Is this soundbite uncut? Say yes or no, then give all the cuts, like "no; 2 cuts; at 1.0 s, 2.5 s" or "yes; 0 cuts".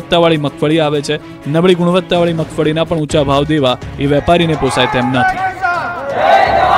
no; 1 cut; at 5.6 s